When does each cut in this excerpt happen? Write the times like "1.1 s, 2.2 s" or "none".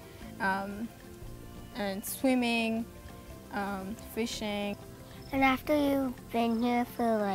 4.8 s